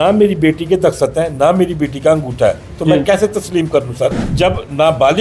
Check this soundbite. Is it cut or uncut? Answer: cut